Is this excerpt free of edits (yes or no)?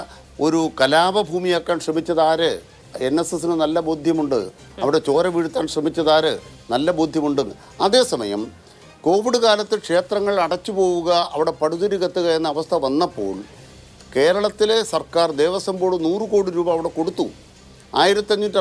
yes